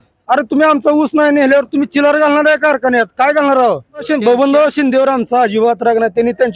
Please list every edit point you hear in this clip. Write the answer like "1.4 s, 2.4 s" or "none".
4.1 s